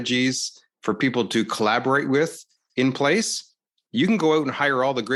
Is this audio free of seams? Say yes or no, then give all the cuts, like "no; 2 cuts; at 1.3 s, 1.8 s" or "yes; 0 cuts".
yes; 0 cuts